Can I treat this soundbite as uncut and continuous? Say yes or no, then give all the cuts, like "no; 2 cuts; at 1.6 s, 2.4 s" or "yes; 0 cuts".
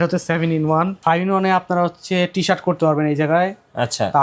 no; 1 cut; at 1.0 s